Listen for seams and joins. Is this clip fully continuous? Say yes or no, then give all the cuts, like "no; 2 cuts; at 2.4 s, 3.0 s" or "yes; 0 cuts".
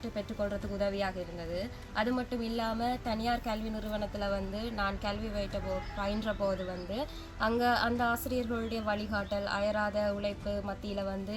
yes; 0 cuts